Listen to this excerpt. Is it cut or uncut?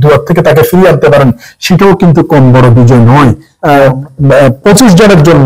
cut